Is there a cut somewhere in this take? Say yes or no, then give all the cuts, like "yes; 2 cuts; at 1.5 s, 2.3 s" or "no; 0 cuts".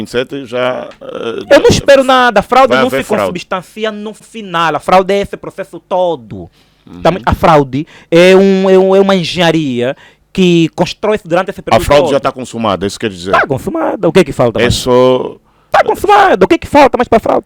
no; 0 cuts